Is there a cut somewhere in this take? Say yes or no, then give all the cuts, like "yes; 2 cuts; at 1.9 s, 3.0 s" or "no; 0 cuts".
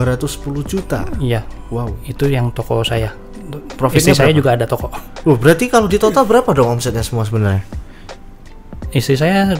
no; 0 cuts